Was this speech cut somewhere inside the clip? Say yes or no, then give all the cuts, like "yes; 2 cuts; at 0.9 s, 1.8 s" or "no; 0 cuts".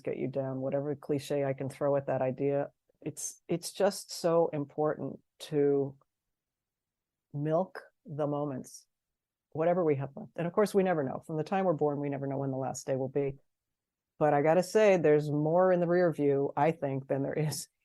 yes; 1 cut; at 2.9 s